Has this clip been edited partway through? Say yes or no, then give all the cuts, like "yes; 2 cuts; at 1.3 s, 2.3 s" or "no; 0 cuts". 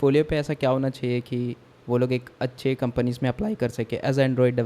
no; 0 cuts